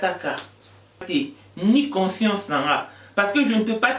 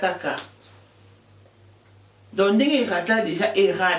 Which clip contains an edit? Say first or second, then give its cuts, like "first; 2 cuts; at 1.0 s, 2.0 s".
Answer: first; 1 cut; at 1.1 s